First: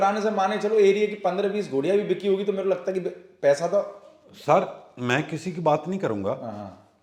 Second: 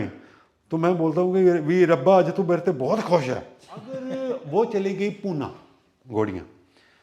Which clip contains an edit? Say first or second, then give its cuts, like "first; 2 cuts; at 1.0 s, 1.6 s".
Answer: second; 1 cut; at 4.1 s